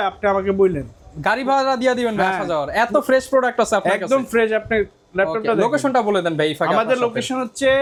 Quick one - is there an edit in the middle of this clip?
no; 0 cuts

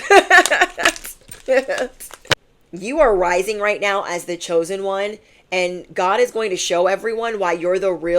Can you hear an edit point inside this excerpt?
yes; 1 cut; at 2.3 s

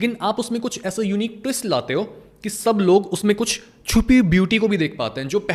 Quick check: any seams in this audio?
no; 0 cuts

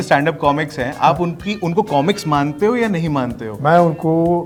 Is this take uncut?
yes; 0 cuts

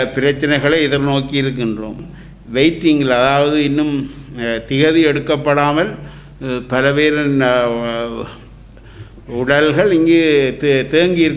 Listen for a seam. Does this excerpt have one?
yes; 1 cut; at 2.0 s

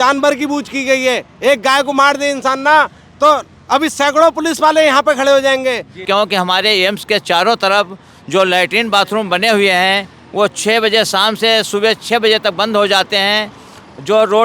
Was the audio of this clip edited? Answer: yes; 1 cut; at 6.0 s

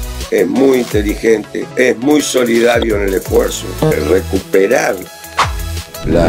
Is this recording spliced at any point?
yes; 2 cuts; at 1.6 s, 3.9 s

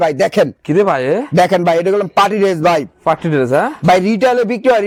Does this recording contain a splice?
no; 0 cuts

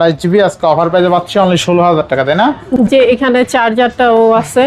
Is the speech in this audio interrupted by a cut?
yes; 1 cut; at 2.8 s

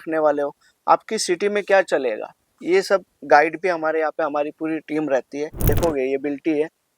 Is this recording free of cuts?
no; 1 cut; at 5.7 s

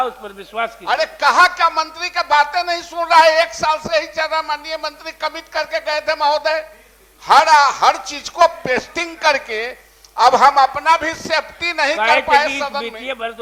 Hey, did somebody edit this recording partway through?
no; 0 cuts

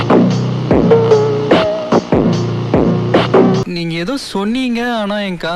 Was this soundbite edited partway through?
no; 0 cuts

